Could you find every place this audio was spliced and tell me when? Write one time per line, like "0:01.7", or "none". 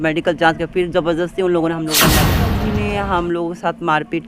0:02.3